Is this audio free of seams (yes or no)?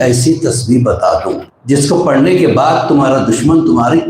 no